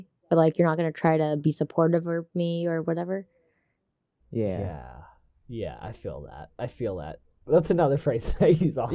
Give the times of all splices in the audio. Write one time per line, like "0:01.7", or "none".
none